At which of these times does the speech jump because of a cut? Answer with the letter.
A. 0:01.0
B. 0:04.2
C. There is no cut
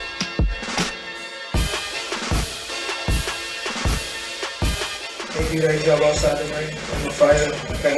A